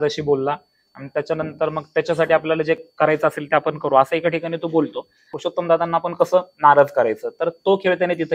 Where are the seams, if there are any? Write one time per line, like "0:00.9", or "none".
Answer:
0:05.3